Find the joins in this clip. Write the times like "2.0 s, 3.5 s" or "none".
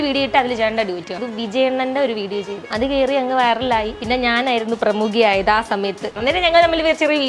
1.1 s, 2.6 s, 4.0 s, 6.1 s